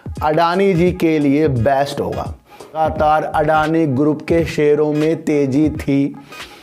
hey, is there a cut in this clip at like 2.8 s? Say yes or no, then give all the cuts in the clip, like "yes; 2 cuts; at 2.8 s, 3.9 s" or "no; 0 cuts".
yes; 1 cut; at 2.8 s